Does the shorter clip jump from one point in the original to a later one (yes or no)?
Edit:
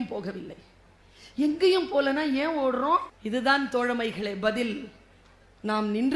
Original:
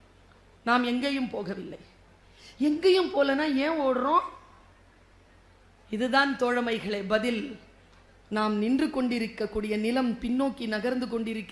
yes